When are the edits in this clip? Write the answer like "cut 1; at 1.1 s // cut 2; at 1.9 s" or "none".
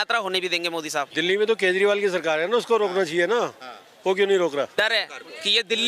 cut 1; at 1.1 s // cut 2; at 4.7 s